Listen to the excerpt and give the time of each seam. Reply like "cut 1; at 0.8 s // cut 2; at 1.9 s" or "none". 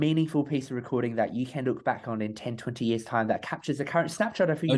none